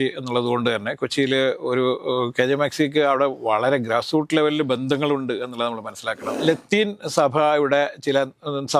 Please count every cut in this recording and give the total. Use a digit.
1